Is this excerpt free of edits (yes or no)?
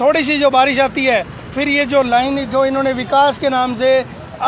yes